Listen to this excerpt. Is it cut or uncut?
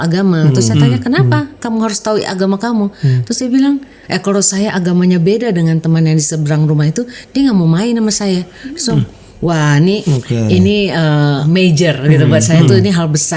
cut